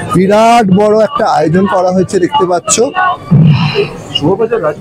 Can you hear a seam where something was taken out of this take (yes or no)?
no